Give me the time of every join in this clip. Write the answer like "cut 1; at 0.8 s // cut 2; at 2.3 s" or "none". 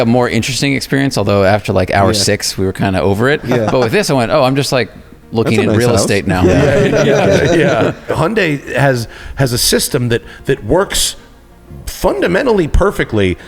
cut 1; at 8.1 s

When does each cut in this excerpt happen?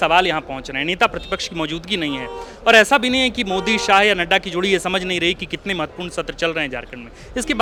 none

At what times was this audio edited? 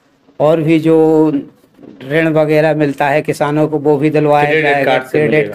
none

